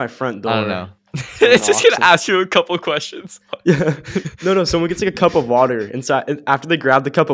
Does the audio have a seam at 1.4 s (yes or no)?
yes